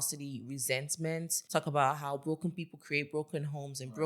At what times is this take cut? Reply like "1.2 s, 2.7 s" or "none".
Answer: 1.3 s